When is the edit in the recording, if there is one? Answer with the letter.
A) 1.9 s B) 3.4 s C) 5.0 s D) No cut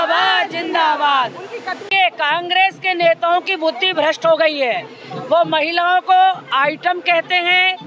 A